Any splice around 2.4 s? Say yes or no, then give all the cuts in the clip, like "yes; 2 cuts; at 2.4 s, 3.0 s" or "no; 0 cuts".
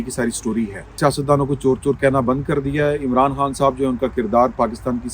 no; 1 cut; at 1.0 s